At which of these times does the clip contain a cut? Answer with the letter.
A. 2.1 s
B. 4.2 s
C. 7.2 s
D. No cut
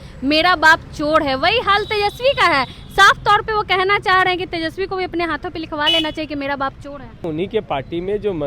C